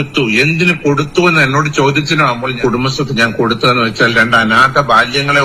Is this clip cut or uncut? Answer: cut